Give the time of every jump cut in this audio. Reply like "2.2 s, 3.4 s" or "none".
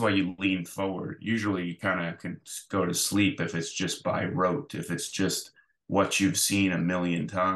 none